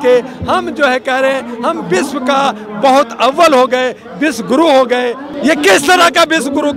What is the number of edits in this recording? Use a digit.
1